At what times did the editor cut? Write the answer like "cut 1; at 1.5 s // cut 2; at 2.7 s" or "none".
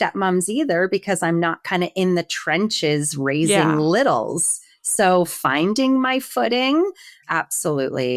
cut 1; at 7.2 s